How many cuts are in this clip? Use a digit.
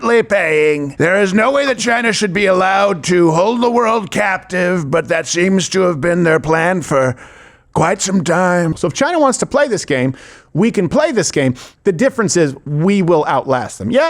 2